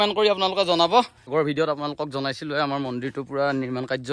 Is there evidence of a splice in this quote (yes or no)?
yes